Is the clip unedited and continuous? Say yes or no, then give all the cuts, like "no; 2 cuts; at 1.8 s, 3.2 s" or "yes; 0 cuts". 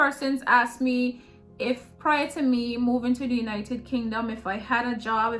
yes; 0 cuts